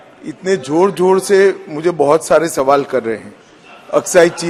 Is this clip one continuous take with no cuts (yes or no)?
yes